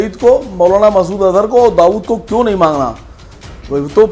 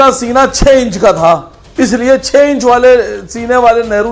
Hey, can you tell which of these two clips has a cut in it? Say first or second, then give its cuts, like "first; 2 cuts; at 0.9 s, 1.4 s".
second; 1 cut; at 1.6 s